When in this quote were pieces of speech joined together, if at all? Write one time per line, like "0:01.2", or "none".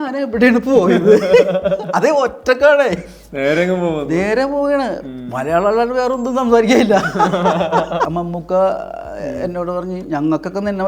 0:08.1